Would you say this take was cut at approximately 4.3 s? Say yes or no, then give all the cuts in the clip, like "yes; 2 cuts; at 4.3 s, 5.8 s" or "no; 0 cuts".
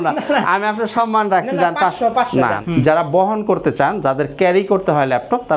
no; 1 cut; at 2.6 s